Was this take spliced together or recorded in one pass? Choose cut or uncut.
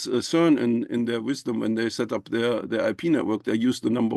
uncut